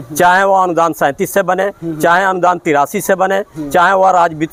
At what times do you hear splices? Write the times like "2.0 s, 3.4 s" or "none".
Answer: none